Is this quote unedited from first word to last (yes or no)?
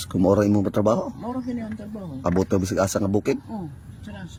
yes